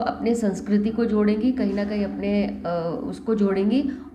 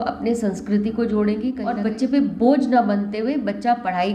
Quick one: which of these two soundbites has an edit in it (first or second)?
second